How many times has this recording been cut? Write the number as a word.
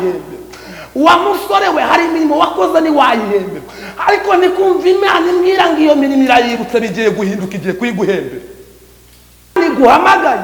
one